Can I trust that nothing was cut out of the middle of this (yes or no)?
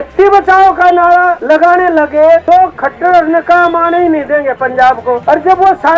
no